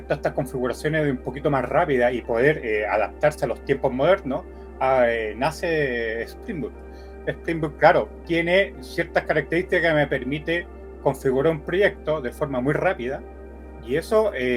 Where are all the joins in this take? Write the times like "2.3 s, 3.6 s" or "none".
none